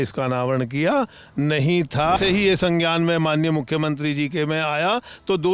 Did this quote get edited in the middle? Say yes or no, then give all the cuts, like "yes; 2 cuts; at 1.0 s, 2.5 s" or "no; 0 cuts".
yes; 1 cut; at 2.2 s